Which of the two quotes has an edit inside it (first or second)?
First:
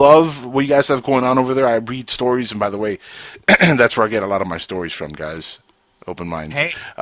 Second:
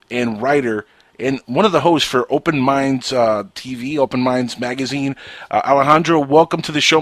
first